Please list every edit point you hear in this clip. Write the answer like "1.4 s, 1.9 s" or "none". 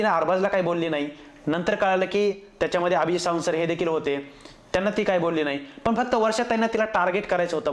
none